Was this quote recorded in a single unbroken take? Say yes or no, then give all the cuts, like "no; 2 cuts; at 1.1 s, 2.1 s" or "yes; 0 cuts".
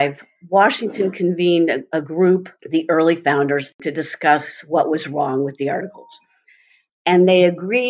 no; 2 cuts; at 2.6 s, 3.7 s